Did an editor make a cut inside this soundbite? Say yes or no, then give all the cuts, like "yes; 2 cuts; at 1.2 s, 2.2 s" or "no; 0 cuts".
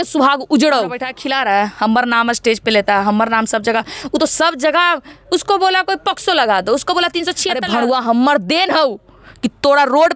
yes; 2 cuts; at 1.1 s, 7.5 s